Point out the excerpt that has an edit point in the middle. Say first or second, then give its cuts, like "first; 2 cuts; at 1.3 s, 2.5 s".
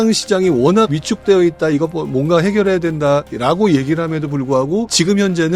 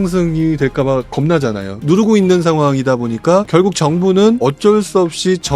second; 3 cuts; at 1.7 s, 3.5 s, 4.4 s